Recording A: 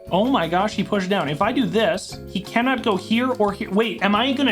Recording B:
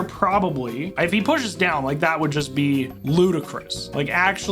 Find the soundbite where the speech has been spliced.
B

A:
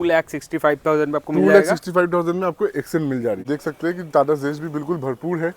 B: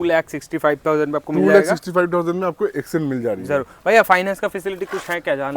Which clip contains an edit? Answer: A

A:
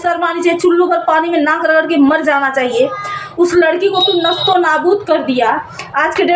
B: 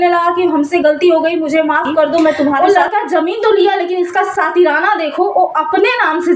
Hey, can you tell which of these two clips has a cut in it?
B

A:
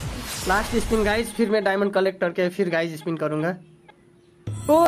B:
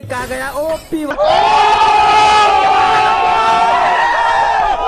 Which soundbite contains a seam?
B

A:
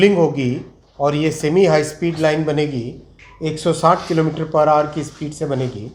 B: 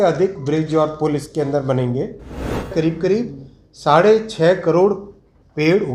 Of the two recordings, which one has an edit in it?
B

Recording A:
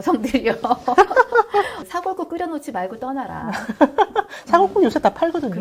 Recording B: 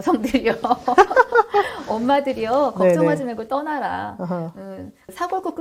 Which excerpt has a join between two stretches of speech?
A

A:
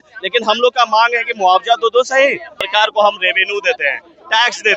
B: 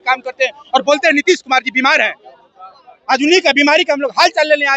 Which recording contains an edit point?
A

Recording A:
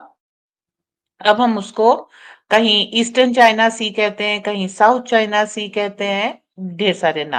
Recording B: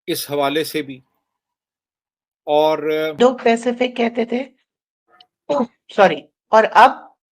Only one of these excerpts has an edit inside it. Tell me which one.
B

